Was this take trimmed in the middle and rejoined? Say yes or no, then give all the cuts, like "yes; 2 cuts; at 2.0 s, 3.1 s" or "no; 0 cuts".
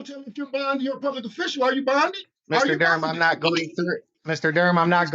yes; 2 cuts; at 2.3 s, 4.1 s